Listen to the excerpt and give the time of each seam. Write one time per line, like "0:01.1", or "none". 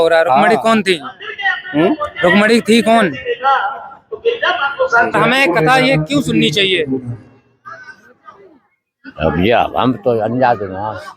0:05.1